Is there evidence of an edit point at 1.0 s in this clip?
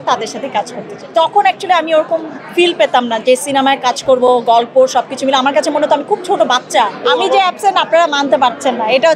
yes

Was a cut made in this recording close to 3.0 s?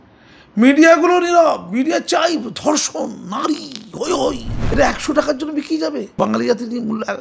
no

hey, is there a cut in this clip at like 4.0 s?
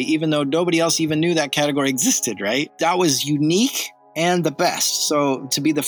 no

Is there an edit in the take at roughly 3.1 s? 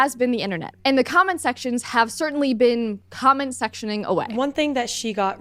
no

